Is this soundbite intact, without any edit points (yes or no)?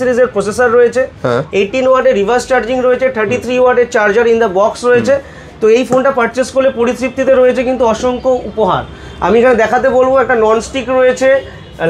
yes